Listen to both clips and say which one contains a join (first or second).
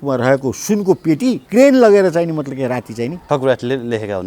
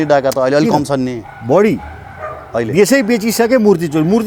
first